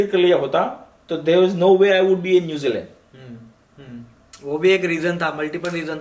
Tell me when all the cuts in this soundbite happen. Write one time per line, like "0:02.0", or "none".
none